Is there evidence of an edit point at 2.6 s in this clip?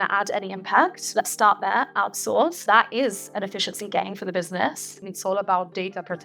yes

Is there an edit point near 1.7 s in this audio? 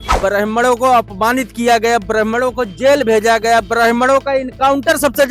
no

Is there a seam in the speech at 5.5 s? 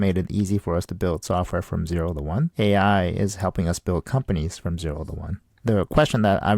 yes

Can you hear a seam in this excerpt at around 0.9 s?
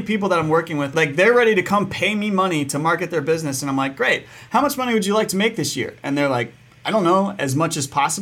yes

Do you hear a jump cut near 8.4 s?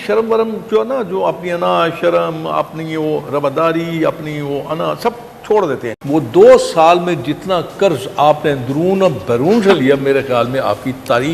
no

